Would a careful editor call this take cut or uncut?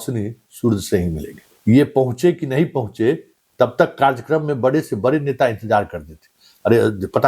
cut